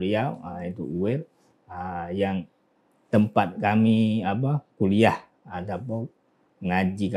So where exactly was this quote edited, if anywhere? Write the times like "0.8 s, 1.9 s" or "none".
none